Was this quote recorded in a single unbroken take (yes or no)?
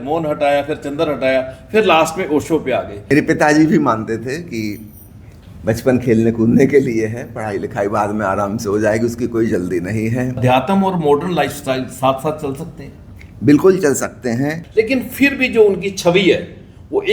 no